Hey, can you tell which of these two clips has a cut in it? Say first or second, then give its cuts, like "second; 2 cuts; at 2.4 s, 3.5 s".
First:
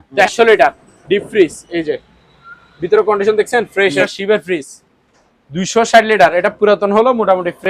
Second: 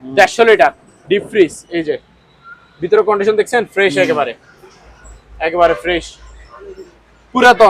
first; 1 cut; at 4.0 s